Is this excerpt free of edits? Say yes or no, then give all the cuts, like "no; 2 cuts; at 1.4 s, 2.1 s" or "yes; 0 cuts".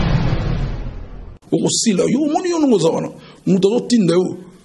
no; 1 cut; at 1.1 s